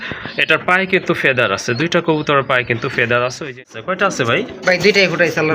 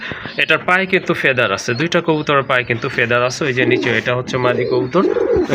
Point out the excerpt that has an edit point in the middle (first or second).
first